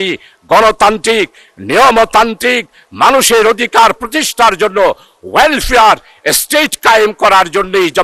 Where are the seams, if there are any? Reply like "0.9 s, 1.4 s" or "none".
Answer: none

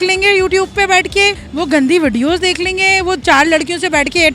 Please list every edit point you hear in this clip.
1.4 s

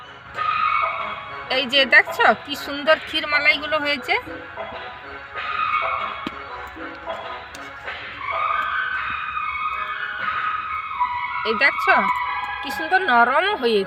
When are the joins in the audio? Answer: none

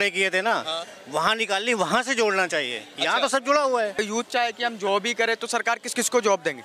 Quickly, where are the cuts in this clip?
4.0 s

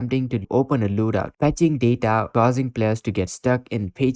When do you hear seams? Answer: 1.3 s, 2.3 s

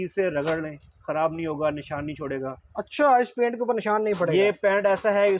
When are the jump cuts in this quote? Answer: none

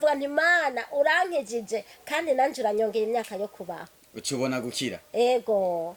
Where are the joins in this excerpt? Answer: none

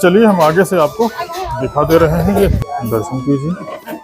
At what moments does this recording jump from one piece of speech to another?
2.6 s

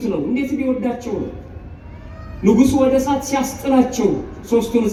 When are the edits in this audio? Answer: none

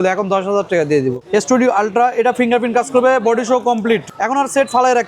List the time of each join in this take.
1.2 s, 4.1 s

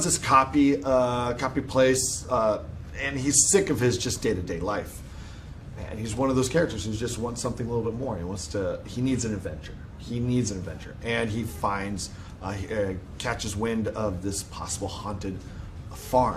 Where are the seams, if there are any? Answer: 10.3 s

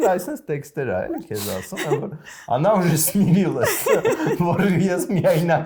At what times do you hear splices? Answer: none

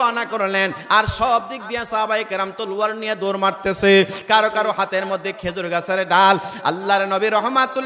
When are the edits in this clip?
none

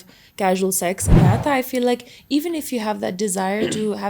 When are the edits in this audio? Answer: 1.2 s

